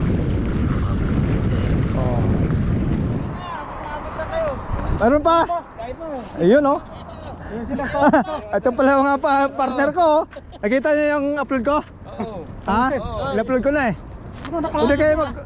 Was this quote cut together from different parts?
yes; 1 cut; at 3.3 s

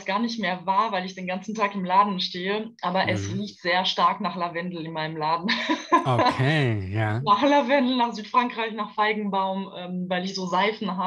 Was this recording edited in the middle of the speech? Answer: no; 0 cuts

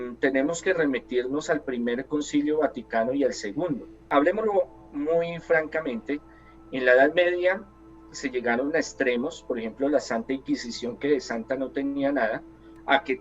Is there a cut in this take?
yes; 1 cut; at 4.0 s

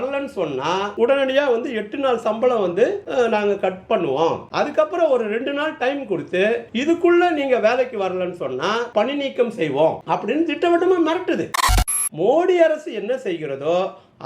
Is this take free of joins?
no; 2 cuts; at 0.9 s, 11.6 s

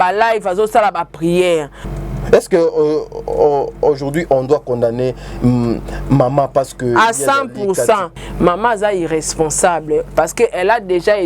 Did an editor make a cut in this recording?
yes; 2 cuts; at 1.8 s, 8.2 s

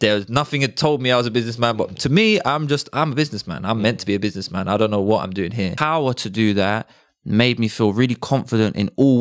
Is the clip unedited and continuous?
no; 1 cut; at 5.8 s

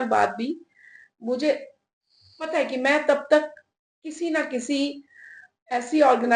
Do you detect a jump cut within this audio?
no; 0 cuts

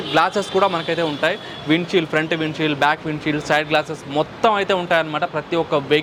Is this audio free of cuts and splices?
yes; 0 cuts

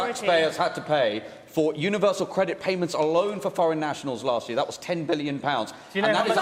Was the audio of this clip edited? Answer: no; 0 cuts

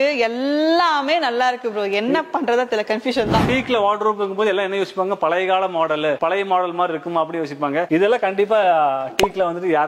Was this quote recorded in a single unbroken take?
no; 1 cut; at 3.5 s

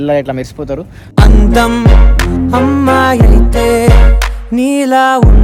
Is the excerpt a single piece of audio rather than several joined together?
yes; 0 cuts

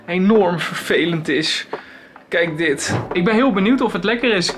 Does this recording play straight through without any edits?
no; 1 cut; at 3.0 s

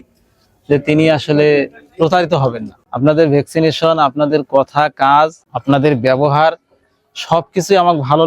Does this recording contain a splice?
yes; 1 cut; at 2.8 s

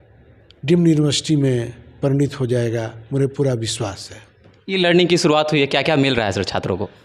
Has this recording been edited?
no; 0 cuts

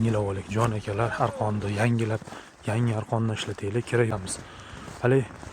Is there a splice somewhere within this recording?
yes; 1 cut; at 4.1 s

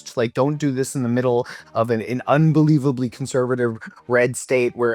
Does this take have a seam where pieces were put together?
no; 0 cuts

